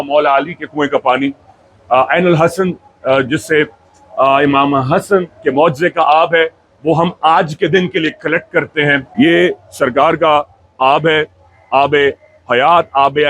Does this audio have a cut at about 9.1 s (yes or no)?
yes